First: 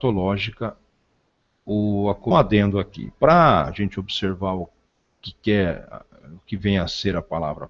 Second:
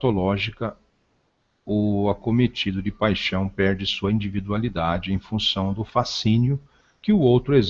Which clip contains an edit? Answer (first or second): second